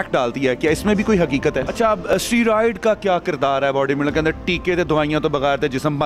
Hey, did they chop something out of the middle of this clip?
yes; 1 cut; at 2.0 s

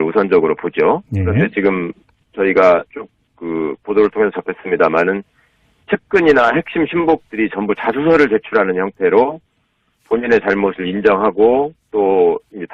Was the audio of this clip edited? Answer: no; 0 cuts

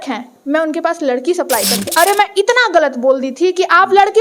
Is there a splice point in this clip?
yes; 1 cut; at 1.9 s

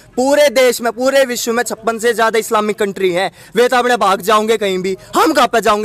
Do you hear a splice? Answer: no; 0 cuts

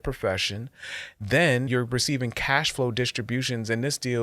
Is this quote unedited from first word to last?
no; 1 cut; at 1.7 s

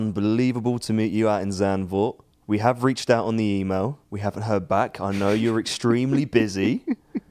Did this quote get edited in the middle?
yes; 2 cuts; at 2.3 s, 4.1 s

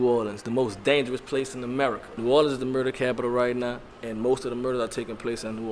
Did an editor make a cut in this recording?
yes; 1 cut; at 2.1 s

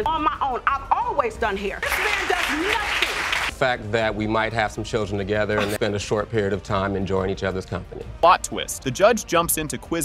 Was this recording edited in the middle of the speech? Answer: no; 0 cuts

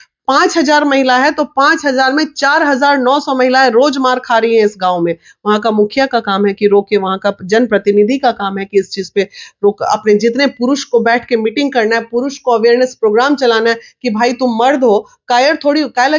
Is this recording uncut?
yes; 0 cuts

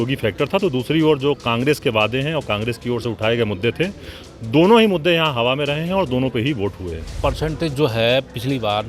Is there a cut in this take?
yes; 1 cut; at 7.1 s

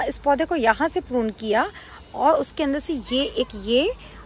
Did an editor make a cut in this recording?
no; 0 cuts

